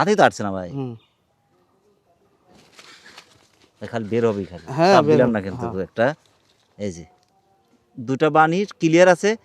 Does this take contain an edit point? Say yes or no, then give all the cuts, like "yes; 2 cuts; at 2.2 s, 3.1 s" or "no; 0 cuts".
no; 0 cuts